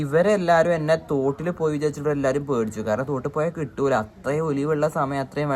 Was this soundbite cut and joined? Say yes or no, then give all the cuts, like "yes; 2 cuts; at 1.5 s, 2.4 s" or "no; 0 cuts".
no; 0 cuts